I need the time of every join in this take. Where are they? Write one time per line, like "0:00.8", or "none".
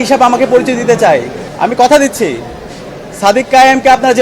0:01.4